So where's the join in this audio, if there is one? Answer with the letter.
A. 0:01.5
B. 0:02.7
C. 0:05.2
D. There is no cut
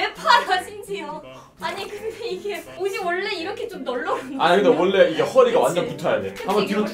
A